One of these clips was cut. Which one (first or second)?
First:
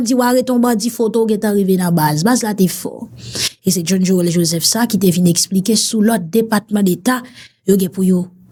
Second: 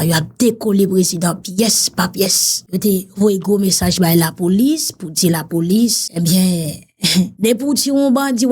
second